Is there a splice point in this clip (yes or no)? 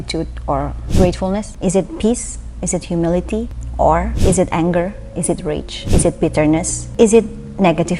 no